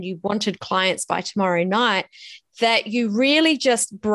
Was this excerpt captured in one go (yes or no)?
yes